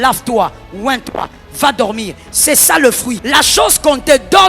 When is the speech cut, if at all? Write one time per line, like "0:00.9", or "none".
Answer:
0:03.2